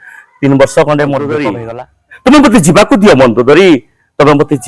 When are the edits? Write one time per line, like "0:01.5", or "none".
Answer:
0:01.5